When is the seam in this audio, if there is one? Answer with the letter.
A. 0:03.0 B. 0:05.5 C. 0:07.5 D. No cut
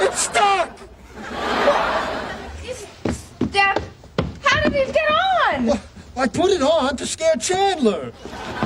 B